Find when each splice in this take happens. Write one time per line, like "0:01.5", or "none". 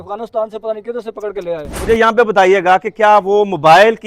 0:01.8